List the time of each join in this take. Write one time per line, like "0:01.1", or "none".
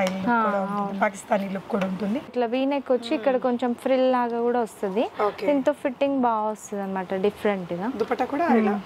0:02.3